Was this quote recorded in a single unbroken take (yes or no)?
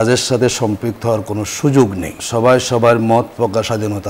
no